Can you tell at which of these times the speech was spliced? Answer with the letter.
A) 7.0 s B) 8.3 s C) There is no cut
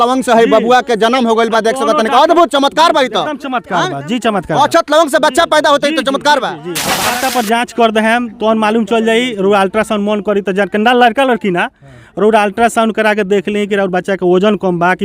A